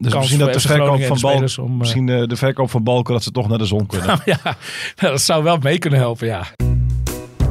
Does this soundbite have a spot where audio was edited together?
yes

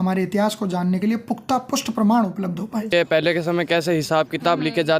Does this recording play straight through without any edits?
no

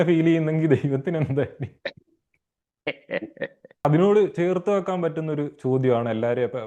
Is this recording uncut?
yes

